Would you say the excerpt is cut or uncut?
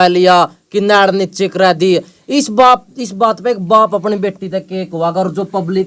uncut